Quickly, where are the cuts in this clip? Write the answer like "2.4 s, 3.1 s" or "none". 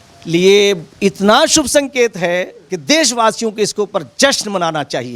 none